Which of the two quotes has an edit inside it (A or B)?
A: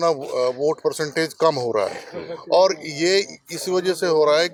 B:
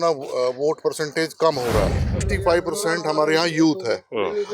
B